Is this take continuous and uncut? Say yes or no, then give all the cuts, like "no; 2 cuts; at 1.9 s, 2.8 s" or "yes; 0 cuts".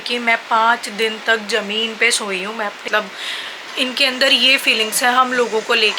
no; 1 cut; at 2.9 s